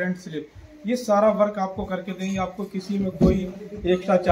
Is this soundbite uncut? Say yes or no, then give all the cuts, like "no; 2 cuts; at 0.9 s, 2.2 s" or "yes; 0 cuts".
yes; 0 cuts